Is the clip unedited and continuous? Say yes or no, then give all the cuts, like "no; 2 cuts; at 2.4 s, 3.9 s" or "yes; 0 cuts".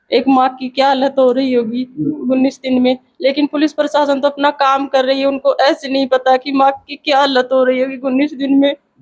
yes; 0 cuts